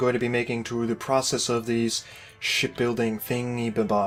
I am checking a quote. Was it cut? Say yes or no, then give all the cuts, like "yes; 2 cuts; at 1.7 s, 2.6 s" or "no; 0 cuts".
no; 0 cuts